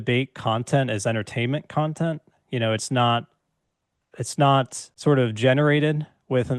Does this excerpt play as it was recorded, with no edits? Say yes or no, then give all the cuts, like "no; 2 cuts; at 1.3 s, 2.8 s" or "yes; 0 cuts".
no; 1 cut; at 4.8 s